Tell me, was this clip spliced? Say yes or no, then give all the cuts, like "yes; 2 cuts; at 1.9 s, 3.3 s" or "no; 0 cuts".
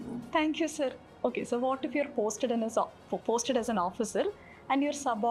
no; 0 cuts